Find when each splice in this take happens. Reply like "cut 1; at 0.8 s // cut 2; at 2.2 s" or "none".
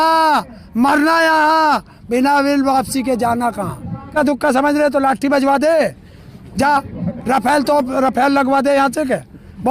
cut 1; at 4.1 s